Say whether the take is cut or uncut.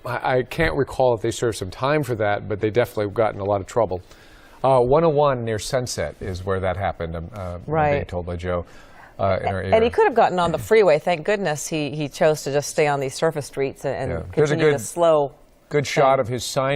uncut